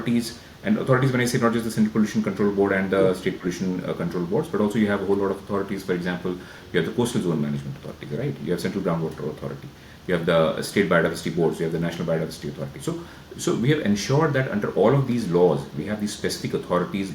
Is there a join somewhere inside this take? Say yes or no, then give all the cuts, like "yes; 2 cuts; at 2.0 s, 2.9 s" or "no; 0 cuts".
no; 0 cuts